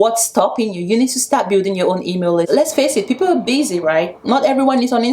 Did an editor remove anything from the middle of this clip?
yes; 1 cut; at 2.5 s

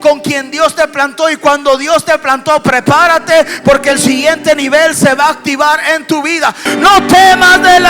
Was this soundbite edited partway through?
yes; 1 cut; at 6.7 s

